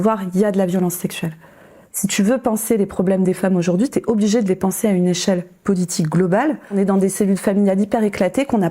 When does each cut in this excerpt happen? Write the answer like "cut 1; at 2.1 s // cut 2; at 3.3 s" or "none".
cut 1; at 6.8 s